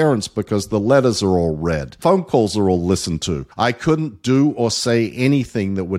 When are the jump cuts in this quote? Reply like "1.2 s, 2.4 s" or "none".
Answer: 1.9 s, 3.4 s